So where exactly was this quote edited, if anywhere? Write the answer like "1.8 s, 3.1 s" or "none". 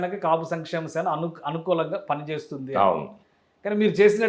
none